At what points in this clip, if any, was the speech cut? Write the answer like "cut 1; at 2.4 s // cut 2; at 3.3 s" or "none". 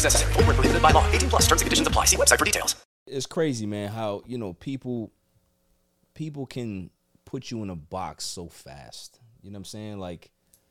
cut 1; at 3.1 s